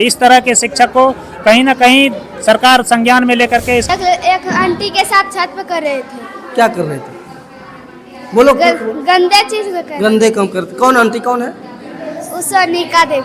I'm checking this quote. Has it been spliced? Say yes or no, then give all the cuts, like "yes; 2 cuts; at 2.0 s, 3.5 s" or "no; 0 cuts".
yes; 1 cut; at 3.9 s